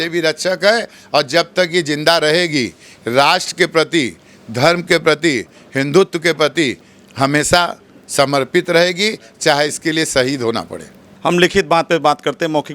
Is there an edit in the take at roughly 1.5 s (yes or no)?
no